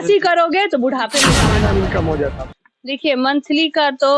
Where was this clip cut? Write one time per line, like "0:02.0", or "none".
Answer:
0:01.5